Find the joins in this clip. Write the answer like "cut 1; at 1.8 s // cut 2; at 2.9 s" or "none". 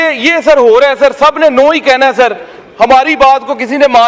none